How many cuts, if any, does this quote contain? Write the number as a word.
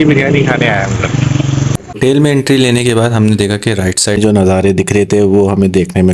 two